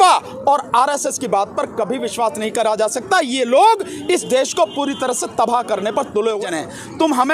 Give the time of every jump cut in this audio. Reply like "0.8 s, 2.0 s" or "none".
6.4 s